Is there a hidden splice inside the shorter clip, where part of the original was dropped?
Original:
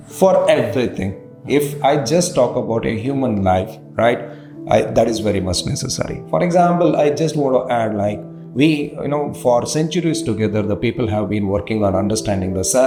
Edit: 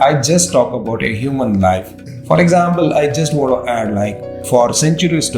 yes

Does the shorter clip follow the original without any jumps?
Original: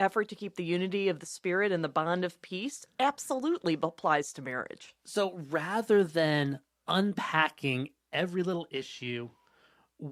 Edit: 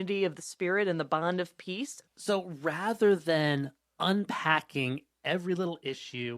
no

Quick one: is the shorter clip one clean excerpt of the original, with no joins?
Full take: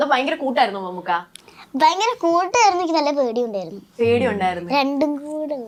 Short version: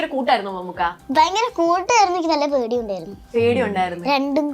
no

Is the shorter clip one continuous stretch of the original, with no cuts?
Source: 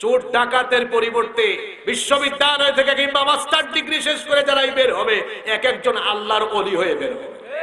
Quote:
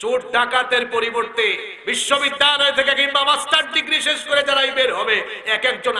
yes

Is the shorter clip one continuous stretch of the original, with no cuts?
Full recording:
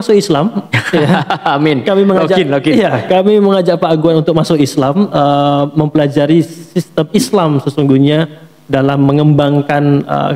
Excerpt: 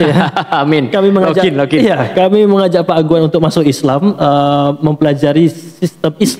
yes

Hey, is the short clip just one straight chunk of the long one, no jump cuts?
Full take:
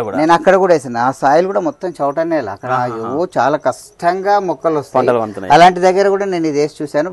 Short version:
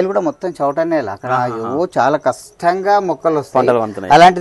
yes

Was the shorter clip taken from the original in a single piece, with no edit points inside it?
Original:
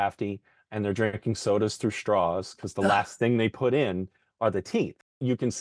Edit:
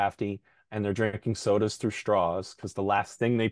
yes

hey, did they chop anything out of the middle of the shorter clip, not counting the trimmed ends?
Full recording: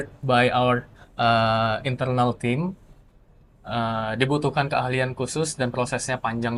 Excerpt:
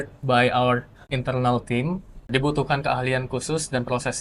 yes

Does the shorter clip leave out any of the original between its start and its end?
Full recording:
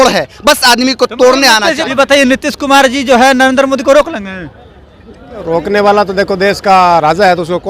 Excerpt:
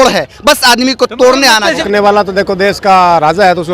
yes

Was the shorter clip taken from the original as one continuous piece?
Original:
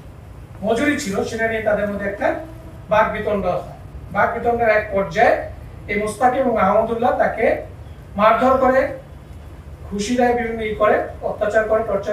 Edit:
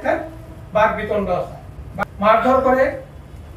no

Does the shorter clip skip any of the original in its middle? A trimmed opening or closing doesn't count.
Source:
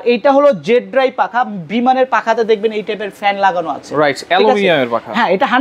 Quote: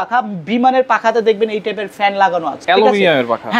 yes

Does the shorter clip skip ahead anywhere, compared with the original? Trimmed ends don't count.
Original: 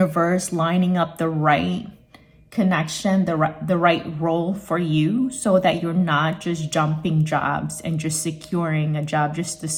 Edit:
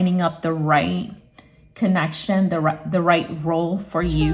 no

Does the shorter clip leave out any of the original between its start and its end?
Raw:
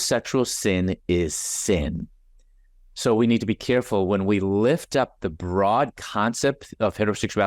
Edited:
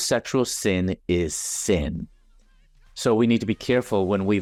no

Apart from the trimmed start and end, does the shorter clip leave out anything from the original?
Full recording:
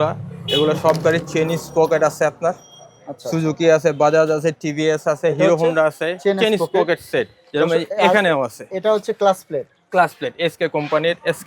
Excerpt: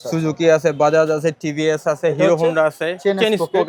no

